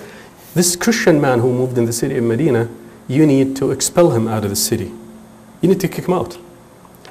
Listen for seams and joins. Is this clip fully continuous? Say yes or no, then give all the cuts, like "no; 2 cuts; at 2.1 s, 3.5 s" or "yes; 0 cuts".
yes; 0 cuts